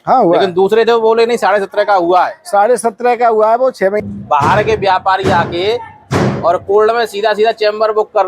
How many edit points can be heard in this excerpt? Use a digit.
1